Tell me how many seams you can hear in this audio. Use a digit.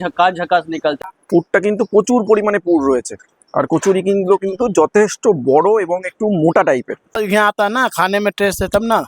2